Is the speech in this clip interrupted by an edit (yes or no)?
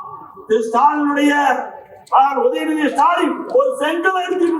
no